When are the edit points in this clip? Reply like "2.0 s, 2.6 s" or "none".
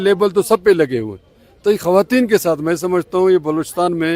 none